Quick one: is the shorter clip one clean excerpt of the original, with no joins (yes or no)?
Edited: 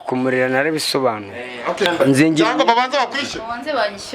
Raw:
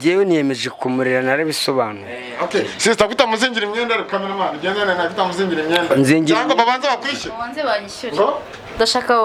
no